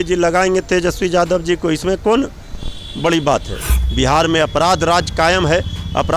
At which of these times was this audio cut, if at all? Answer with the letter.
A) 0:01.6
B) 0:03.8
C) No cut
B